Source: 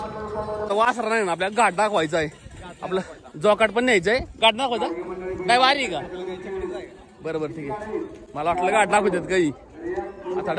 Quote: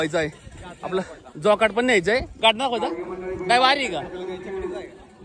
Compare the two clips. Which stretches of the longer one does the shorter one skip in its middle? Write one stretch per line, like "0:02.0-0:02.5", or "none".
none